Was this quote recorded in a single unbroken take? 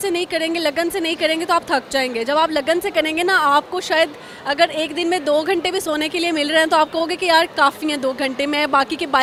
yes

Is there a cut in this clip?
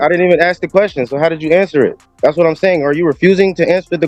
no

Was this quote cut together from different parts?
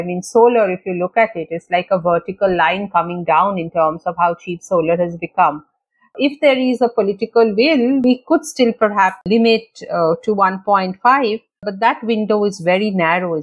yes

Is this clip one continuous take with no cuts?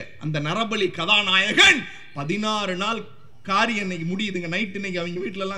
yes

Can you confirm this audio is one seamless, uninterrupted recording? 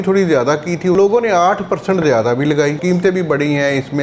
no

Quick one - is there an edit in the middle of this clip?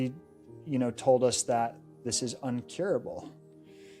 no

